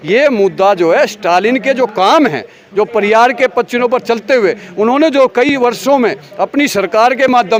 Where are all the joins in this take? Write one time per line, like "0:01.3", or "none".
none

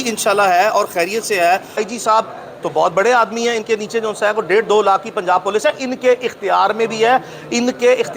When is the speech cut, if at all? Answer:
0:01.8

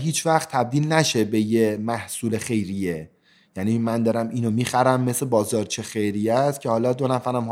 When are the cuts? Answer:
none

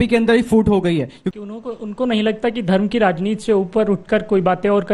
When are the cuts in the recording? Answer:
0:01.2

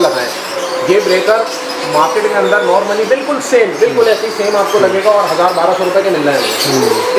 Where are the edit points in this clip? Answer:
none

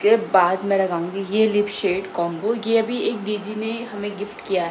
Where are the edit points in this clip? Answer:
none

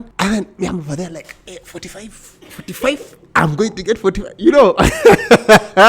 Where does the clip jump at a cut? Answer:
none

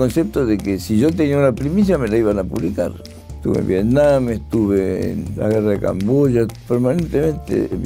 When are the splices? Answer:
0:03.1
0:05.2
0:06.5

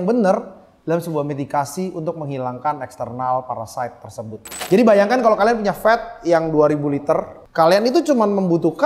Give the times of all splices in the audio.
0:04.6
0:07.4

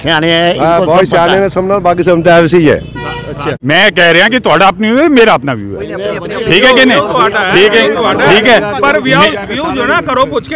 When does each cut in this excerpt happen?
0:03.5

